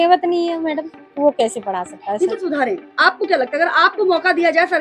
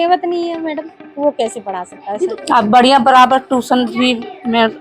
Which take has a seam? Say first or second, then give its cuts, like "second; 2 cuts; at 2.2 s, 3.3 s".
second; 1 cut; at 2.4 s